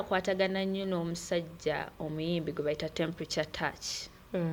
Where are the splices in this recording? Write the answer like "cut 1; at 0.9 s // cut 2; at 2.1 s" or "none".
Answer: none